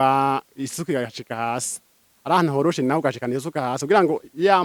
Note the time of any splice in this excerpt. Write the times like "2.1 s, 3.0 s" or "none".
none